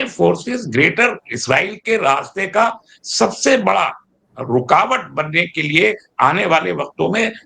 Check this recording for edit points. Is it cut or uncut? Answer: uncut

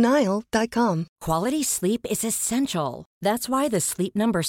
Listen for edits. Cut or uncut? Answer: cut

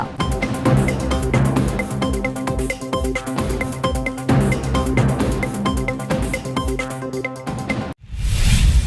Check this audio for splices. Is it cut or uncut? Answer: cut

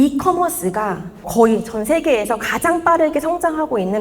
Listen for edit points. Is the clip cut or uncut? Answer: cut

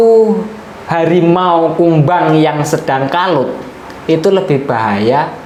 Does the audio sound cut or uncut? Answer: uncut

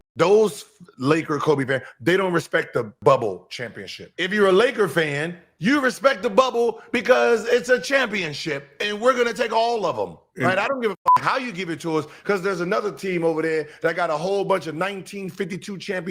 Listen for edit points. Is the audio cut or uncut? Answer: cut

